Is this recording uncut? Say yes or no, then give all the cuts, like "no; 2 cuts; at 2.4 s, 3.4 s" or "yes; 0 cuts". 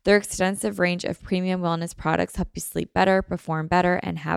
yes; 0 cuts